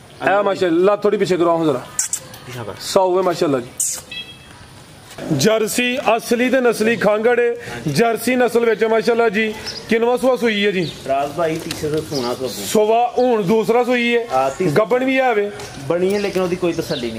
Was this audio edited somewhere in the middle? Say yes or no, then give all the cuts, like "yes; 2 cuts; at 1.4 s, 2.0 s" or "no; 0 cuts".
yes; 1 cut; at 5.1 s